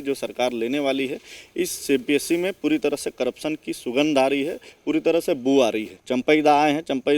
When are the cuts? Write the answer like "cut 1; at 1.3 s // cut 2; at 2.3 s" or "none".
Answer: cut 1; at 5.9 s

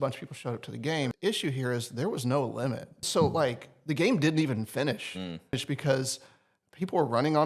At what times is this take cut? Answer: cut 1; at 1.1 s // cut 2; at 3.1 s // cut 3; at 5.6 s

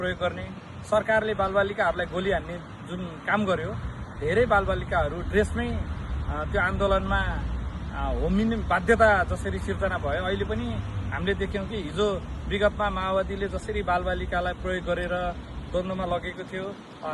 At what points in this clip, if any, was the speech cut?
none

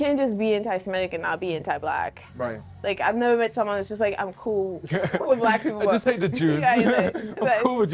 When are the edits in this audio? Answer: none

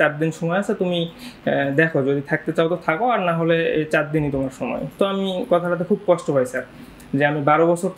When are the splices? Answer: none

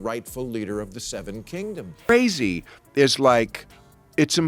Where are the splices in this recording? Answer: cut 1; at 2.0 s

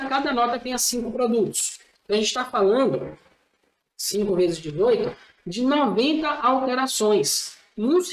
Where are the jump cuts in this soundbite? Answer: none

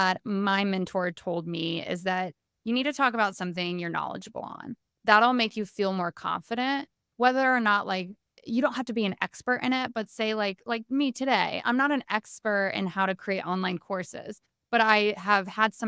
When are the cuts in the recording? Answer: none

